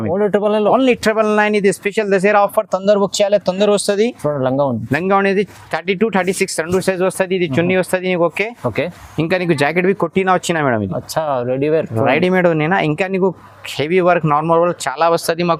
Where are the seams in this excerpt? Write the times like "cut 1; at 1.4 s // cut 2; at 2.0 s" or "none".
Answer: none